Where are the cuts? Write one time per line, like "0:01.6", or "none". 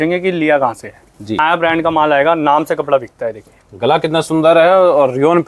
0:01.4

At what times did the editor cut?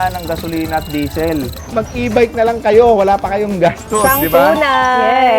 0:01.6

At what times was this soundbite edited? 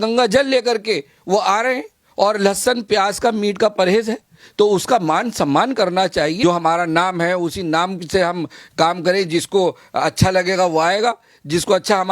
0:06.4

